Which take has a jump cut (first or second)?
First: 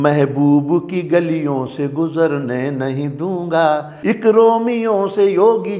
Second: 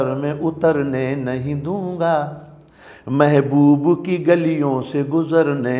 first